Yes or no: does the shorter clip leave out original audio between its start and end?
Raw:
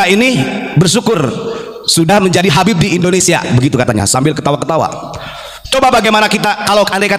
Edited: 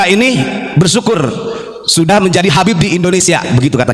no